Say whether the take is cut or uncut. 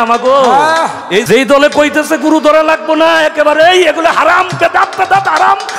cut